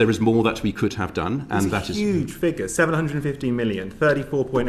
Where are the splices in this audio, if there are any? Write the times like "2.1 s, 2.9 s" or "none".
none